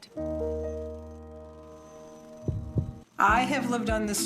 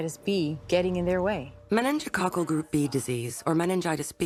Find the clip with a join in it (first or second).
first